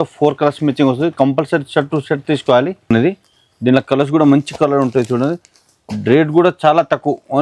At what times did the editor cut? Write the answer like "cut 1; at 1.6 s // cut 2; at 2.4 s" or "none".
cut 1; at 2.9 s